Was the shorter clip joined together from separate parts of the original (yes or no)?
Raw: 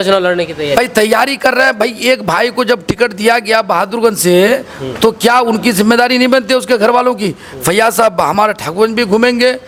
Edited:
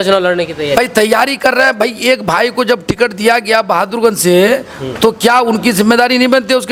no